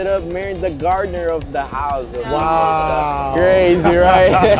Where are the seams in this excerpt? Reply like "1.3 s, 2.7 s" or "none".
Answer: none